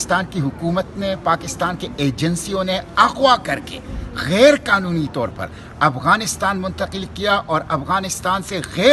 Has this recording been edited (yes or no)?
no